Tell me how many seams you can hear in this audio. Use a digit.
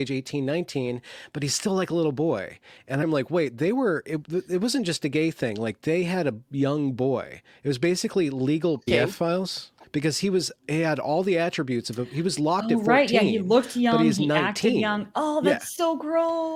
1